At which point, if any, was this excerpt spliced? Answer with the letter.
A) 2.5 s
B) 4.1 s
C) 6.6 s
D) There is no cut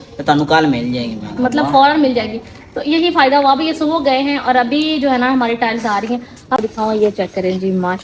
C